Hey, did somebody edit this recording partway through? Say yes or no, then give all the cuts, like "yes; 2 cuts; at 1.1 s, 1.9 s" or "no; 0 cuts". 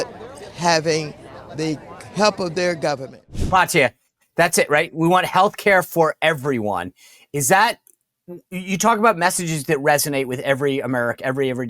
yes; 1 cut; at 3.3 s